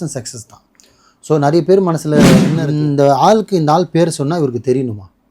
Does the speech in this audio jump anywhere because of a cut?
yes; 1 cut; at 2.6 s

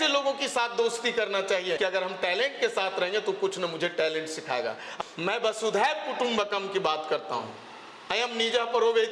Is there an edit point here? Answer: yes; 2 cuts; at 1.8 s, 4.9 s

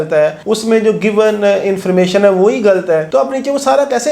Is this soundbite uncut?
yes; 0 cuts

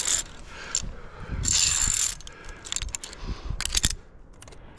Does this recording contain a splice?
no; 0 cuts

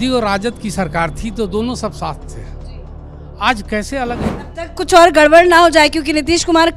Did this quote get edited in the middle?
yes; 1 cut; at 4.3 s

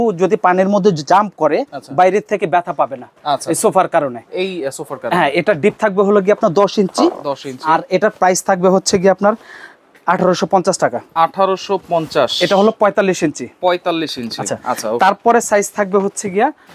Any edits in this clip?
no; 0 cuts

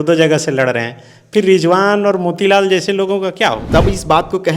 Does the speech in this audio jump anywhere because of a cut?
yes; 1 cut; at 3.6 s

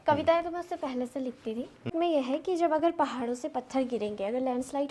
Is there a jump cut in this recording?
yes; 1 cut; at 1.9 s

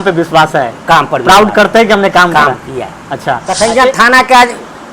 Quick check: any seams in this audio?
yes; 1 cut; at 3.5 s

